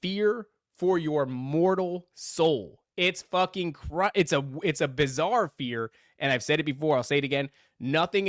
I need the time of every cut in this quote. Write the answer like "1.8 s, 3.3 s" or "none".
none